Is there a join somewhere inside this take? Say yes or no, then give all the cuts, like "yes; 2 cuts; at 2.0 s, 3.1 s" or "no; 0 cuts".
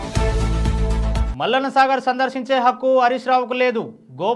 yes; 1 cut; at 1.3 s